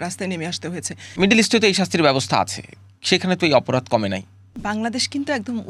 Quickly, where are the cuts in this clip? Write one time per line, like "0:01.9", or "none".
0:01.1
0:04.4